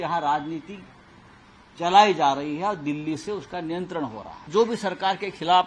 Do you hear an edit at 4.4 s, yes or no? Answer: yes